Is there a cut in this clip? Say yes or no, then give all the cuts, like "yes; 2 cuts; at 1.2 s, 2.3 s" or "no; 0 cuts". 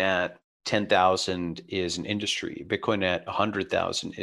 no; 0 cuts